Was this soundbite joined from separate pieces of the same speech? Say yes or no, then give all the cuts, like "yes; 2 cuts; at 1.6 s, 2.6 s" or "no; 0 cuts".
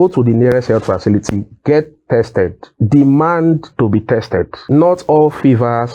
yes; 1 cut; at 4.6 s